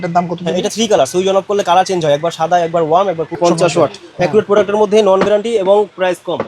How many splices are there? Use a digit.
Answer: 1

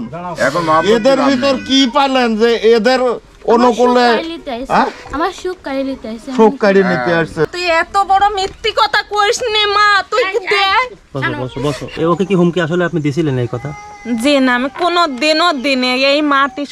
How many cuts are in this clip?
2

